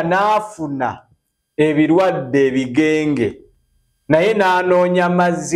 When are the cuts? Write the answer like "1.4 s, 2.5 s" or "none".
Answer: none